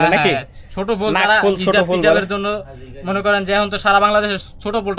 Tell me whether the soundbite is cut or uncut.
uncut